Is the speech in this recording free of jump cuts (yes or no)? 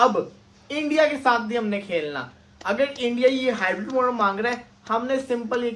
yes